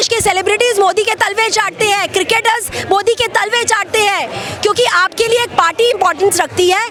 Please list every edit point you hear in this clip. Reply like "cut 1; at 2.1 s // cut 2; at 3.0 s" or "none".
none